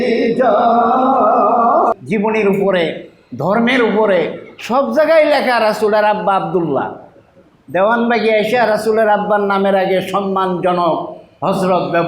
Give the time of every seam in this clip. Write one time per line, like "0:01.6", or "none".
0:01.9